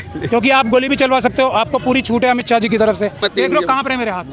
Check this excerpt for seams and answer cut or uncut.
cut